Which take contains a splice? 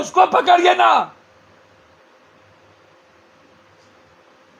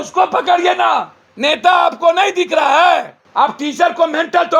second; 2 cuts; at 1.2 s, 3.2 s

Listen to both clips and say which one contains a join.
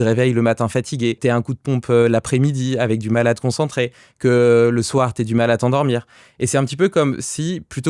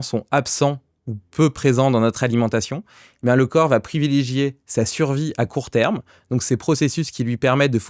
first; 1 cut; at 1.2 s

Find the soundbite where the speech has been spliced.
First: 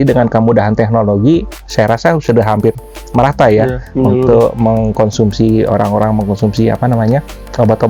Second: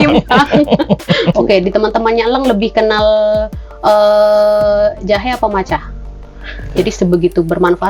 second; 2 cuts; at 1.3 s, 6.6 s

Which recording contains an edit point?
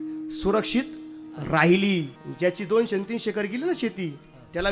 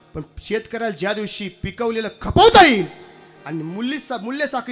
first; 1 cut; at 2.2 s

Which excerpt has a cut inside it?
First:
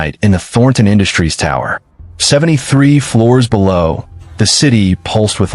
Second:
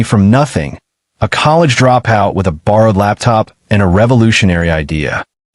first; 1 cut; at 4.6 s

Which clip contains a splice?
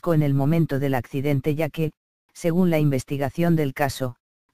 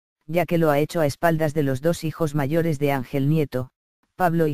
first; 1 cut; at 3.5 s

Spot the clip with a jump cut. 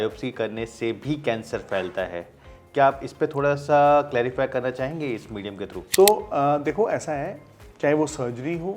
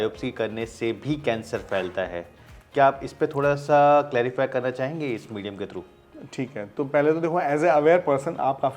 first; 1 cut; at 5.8 s

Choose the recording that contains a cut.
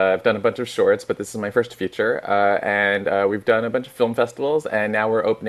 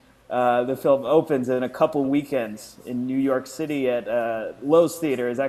second; 1 cut; at 3.4 s

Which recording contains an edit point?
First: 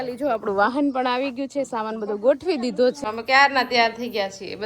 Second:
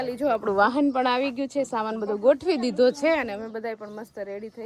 first; 1 cut; at 3.0 s

